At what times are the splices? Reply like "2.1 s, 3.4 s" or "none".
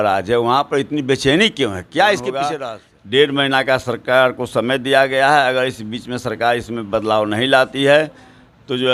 2.6 s